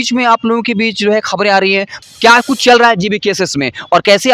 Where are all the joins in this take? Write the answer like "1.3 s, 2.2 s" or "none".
1.9 s

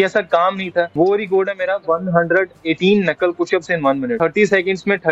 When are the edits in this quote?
0.9 s, 4.1 s

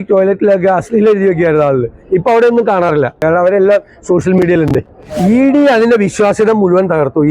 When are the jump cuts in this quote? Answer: 3.2 s

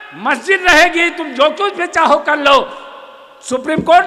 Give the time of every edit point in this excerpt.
none

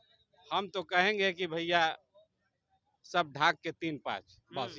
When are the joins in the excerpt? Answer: none

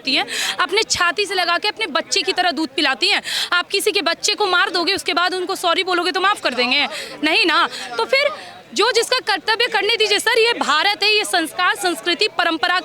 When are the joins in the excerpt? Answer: none

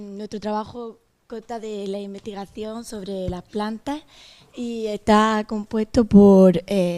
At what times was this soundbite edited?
3.7 s

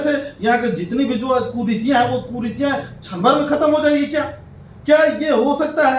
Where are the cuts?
none

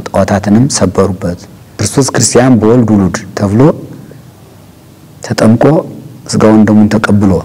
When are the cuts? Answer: 1.8 s

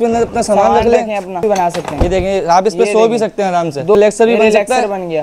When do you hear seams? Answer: 1.4 s, 4.0 s

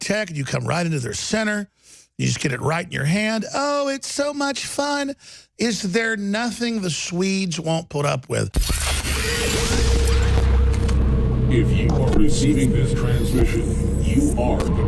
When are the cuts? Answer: 8.6 s

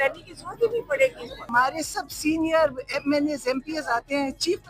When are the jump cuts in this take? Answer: 1.3 s

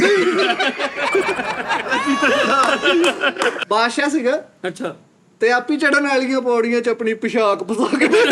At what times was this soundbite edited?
3.6 s

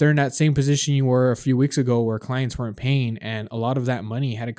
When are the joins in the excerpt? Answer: none

